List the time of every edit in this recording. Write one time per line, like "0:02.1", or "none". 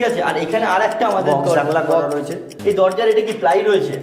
0:02.5